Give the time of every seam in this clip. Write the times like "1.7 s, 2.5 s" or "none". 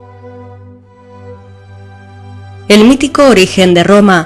none